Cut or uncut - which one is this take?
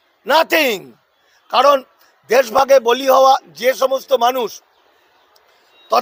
uncut